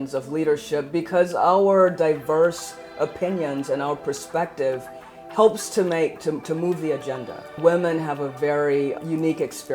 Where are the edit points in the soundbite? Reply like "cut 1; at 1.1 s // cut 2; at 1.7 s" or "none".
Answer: cut 1; at 7.6 s // cut 2; at 9.0 s